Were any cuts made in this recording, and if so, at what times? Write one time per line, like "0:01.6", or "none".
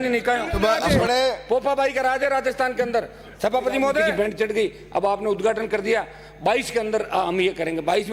0:00.9
0:04.1